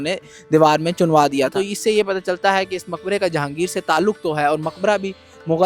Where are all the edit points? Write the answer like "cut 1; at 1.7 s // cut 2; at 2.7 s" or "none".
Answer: cut 1; at 1.5 s

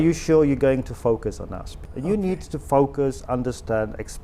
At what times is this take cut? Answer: cut 1; at 1.8 s

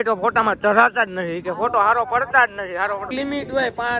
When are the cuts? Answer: cut 1; at 1.4 s // cut 2; at 3.1 s

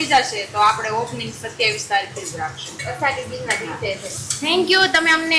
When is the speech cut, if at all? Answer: none

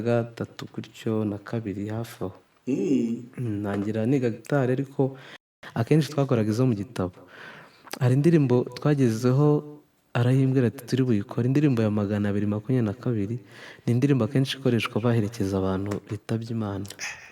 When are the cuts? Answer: cut 1; at 5.4 s

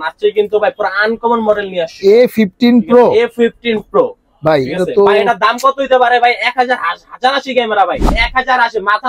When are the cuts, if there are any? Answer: cut 1; at 8.0 s

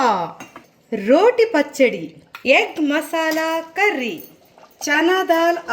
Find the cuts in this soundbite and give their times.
cut 1; at 2.3 s // cut 2; at 4.6 s

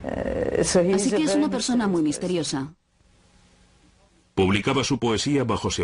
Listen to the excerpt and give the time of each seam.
cut 1; at 3.0 s

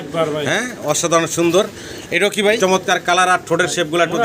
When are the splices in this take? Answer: cut 1; at 2.6 s

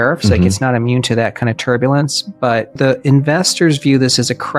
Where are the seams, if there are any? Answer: cut 1; at 2.8 s

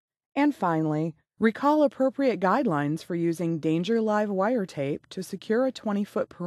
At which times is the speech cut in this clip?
cut 1; at 1.2 s

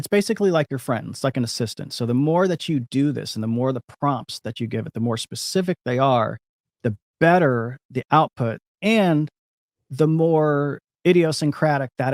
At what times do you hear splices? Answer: cut 1; at 10.8 s

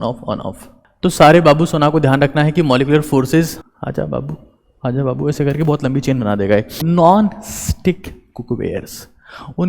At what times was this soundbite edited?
cut 1; at 3.5 s // cut 2; at 6.8 s

